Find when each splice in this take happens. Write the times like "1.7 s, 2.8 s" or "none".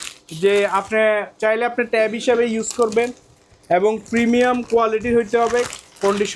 none